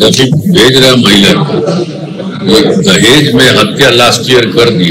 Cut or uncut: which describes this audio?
uncut